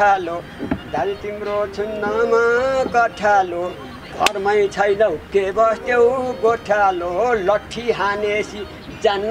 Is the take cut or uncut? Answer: uncut